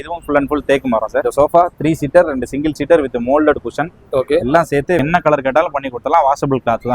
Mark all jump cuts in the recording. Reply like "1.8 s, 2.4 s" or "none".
1.2 s, 5.0 s